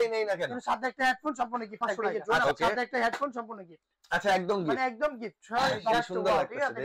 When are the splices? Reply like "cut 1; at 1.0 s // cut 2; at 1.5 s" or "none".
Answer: cut 1; at 2.4 s // cut 2; at 5.9 s